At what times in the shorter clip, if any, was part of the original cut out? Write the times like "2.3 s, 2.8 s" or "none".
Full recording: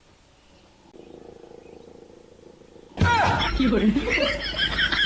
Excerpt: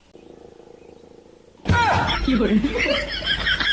1.5 s